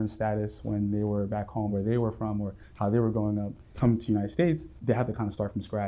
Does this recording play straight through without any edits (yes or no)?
no